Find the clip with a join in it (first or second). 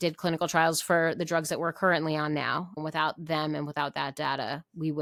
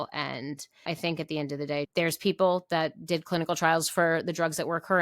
second